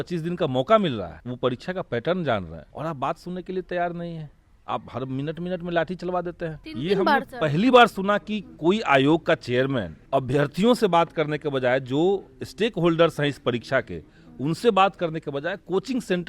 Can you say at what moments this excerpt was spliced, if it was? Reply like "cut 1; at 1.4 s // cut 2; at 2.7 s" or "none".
cut 1; at 1.2 s // cut 2; at 2.6 s // cut 3; at 6.6 s // cut 4; at 10.0 s